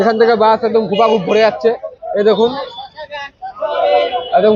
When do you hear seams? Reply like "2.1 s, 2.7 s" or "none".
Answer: none